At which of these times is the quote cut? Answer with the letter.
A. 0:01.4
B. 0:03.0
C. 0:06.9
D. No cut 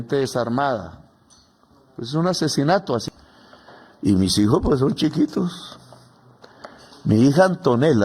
B